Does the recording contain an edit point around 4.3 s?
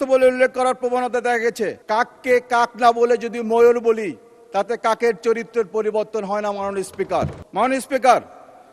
no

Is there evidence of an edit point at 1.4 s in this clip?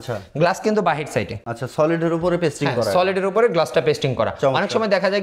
no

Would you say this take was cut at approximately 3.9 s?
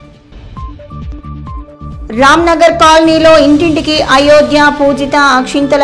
no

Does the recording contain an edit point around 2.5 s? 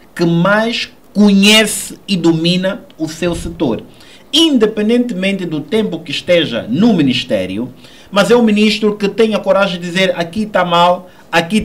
no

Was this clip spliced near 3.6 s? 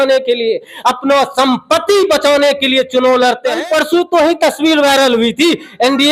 yes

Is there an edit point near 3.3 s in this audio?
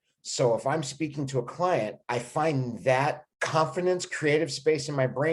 yes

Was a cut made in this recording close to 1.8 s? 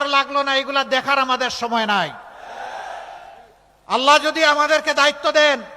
yes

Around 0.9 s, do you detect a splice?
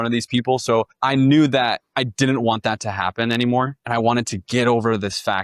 yes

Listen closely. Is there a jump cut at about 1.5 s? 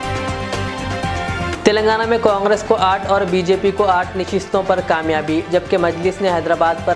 yes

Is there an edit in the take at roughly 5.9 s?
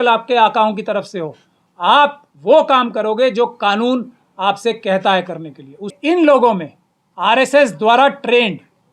yes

